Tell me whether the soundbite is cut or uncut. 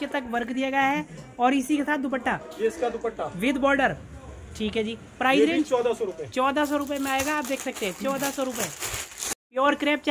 uncut